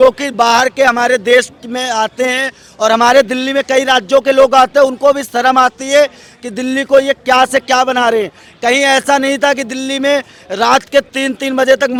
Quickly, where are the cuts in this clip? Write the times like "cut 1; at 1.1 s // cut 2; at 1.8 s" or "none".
none